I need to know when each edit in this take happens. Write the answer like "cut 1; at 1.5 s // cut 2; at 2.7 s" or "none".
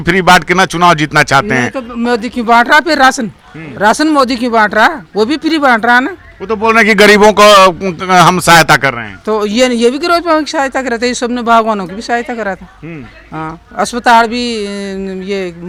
none

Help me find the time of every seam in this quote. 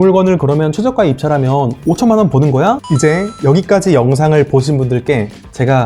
cut 1; at 2.9 s

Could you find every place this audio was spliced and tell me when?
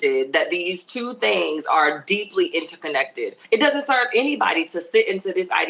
cut 1; at 3.4 s

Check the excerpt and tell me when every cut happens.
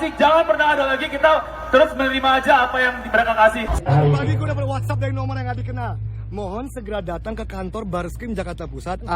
cut 1; at 3.7 s

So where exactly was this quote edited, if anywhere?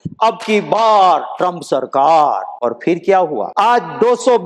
cut 1; at 2.5 s // cut 2; at 3.5 s

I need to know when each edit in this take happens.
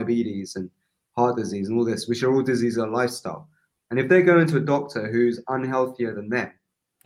none

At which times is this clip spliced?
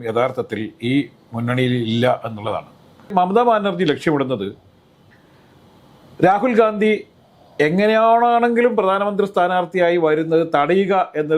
cut 1; at 3.1 s

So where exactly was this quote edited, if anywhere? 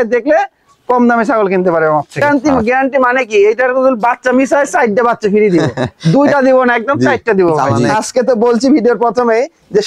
cut 1; at 2.2 s // cut 2; at 7.8 s

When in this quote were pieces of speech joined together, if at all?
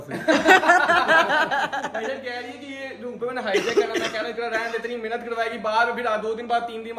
none

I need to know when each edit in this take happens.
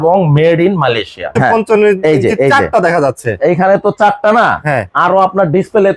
cut 1; at 1.3 s

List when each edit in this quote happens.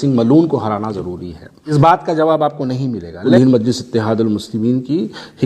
cut 1; at 1.7 s // cut 2; at 3.3 s

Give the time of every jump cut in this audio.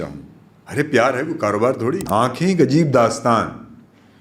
cut 1; at 2.0 s

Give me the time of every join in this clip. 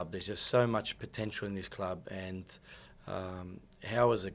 none

